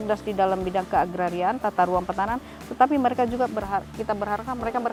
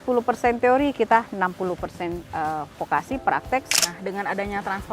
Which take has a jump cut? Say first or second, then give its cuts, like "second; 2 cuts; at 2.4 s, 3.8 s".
second; 1 cut; at 3.7 s